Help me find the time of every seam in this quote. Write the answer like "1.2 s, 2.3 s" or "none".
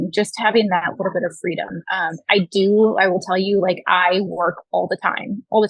none